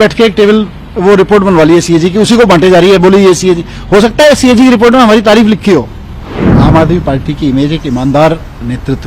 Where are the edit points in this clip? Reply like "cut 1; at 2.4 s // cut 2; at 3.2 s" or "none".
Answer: cut 1; at 6.5 s